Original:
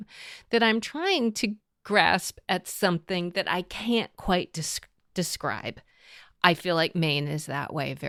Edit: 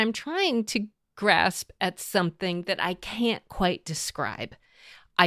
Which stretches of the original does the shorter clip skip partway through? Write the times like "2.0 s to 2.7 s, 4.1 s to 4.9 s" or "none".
4.8 s to 5.3 s